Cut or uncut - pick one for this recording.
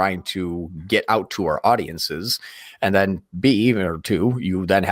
uncut